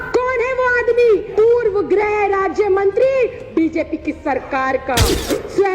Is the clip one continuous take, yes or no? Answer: no